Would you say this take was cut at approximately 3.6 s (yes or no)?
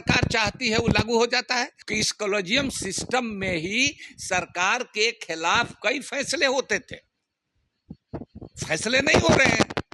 no